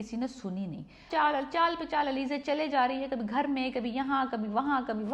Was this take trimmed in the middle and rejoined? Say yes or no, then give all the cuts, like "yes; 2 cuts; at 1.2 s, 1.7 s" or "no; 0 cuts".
yes; 1 cut; at 1.0 s